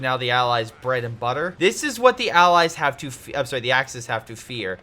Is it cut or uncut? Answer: cut